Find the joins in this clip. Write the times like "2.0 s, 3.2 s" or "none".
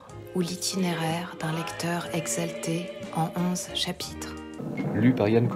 4.6 s